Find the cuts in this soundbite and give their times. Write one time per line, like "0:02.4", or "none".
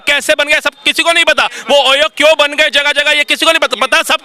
none